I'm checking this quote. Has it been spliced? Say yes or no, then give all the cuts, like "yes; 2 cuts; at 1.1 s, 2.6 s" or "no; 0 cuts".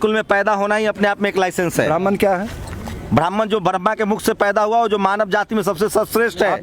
no; 0 cuts